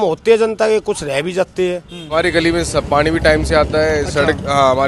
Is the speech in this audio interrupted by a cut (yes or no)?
yes